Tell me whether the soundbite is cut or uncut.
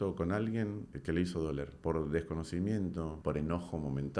cut